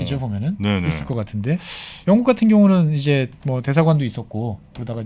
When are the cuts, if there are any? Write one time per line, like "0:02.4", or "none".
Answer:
none